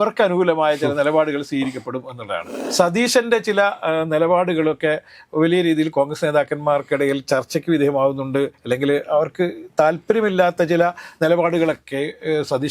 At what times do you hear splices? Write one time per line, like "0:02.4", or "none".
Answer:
0:02.5